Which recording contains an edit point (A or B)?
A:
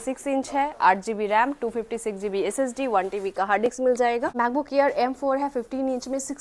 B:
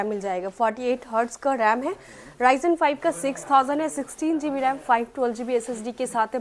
A